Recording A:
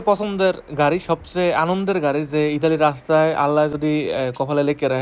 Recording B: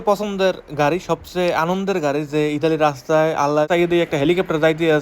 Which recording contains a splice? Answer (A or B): B